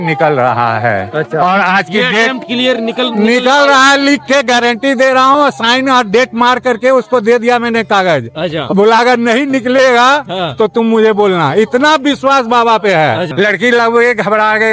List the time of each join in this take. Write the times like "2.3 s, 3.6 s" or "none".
13.3 s